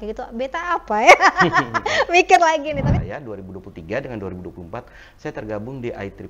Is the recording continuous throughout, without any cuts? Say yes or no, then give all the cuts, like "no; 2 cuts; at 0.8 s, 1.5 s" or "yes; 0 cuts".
no; 1 cut; at 3.0 s